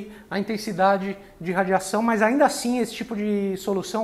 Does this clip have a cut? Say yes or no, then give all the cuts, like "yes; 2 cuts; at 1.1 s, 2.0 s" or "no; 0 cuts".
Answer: no; 0 cuts